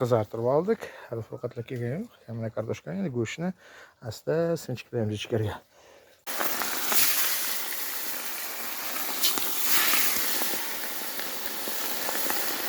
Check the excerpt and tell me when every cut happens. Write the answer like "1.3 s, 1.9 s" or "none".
6.3 s